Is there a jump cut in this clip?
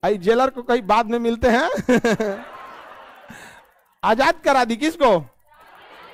no; 0 cuts

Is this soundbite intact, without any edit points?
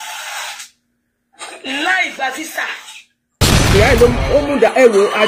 no; 1 cut; at 3.5 s

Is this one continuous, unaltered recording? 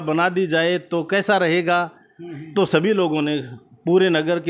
yes; 0 cuts

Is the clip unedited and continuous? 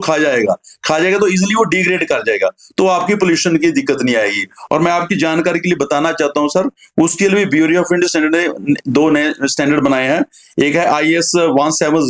yes; 0 cuts

